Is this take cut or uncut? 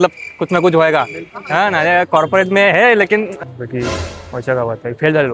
cut